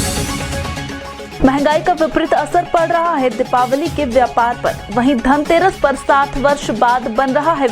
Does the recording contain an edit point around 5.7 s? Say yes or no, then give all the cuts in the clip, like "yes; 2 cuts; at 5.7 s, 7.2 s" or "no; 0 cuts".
no; 1 cut; at 1.4 s